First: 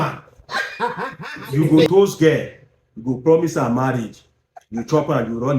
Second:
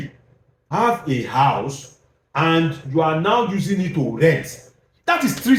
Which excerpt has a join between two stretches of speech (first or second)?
first